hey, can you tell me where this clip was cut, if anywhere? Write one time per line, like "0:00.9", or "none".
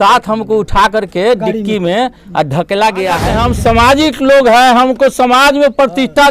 0:03.3